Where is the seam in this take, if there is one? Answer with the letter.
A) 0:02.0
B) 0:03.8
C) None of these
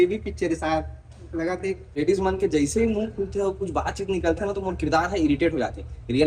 A